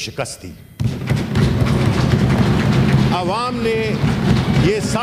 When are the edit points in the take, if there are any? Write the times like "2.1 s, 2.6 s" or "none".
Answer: none

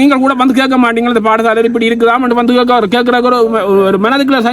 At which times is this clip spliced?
none

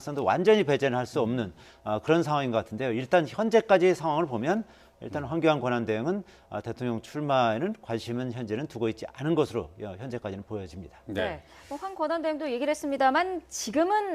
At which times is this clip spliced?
4.4 s

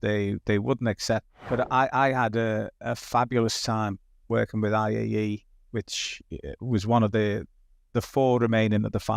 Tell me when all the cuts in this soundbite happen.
1.4 s

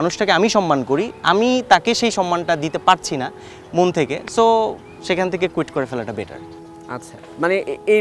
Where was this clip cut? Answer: none

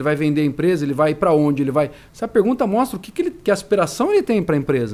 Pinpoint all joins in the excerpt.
none

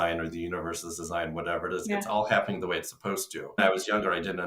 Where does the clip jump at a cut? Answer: 3.6 s

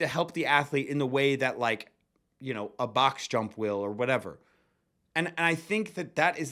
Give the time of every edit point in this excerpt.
none

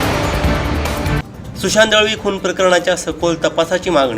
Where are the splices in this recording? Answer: 1.2 s

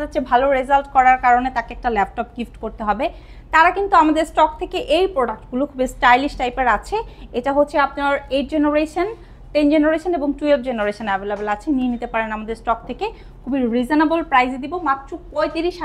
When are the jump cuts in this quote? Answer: none

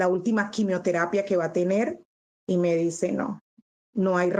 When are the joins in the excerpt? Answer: 2.1 s

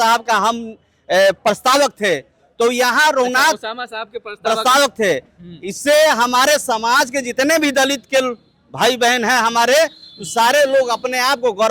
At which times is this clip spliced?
none

